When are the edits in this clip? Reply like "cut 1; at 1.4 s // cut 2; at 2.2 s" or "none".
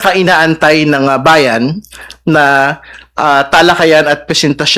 none